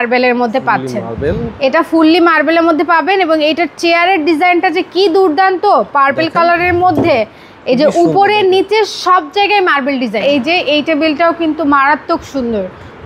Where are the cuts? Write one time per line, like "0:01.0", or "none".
0:10.2